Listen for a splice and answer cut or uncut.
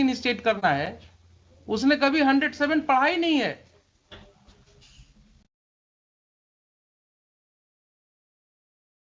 uncut